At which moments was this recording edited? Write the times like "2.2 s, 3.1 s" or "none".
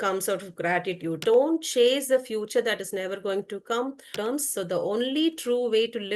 1.2 s, 4.1 s